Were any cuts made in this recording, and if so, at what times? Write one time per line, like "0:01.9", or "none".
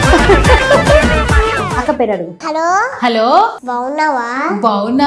none